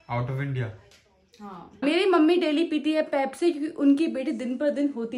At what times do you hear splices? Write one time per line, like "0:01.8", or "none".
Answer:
0:01.7